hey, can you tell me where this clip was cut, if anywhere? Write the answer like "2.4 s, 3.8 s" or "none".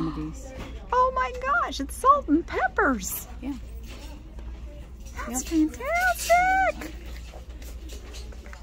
none